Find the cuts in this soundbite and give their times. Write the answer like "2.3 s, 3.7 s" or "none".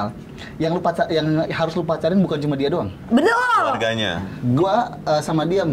4.3 s